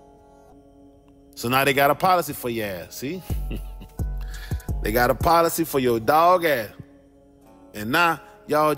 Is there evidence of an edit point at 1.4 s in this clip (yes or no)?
yes